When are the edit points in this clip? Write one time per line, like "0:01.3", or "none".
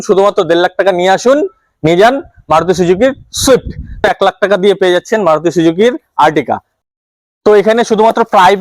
0:04.0
0:06.8